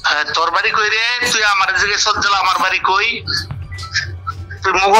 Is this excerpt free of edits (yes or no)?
yes